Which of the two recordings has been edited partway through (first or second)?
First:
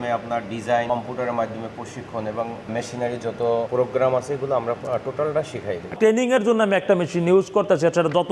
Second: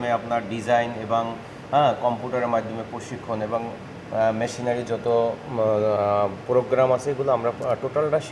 first